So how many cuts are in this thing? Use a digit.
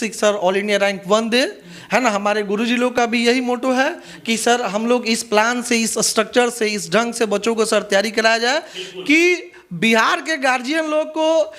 0